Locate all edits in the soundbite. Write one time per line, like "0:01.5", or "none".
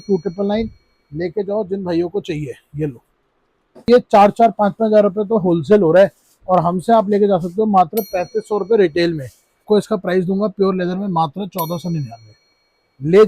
0:03.9
0:09.6